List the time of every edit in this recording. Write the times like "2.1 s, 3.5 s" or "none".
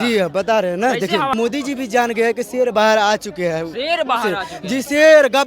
1.3 s